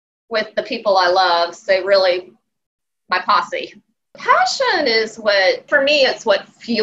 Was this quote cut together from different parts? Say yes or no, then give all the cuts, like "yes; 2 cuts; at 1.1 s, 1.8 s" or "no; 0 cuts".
yes; 2 cuts; at 4.2 s, 5.7 s